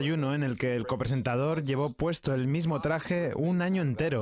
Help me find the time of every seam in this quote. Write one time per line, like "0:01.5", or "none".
none